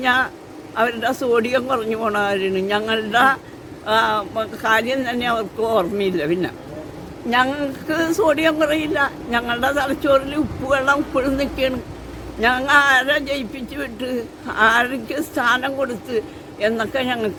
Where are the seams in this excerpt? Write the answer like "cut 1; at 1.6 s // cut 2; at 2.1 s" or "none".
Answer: none